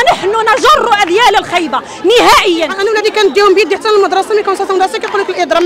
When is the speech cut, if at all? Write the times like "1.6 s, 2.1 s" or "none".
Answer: 2.8 s